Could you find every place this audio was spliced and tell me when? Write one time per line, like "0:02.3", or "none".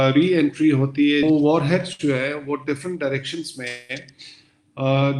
0:01.2